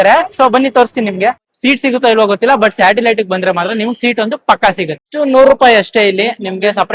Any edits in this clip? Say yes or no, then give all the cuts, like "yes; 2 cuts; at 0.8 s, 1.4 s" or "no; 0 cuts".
yes; 2 cuts; at 1.5 s, 5.0 s